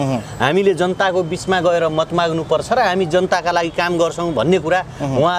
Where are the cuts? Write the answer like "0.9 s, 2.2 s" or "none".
none